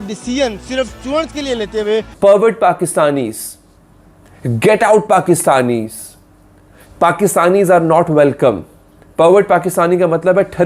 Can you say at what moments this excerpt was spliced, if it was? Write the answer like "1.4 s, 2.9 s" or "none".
2.1 s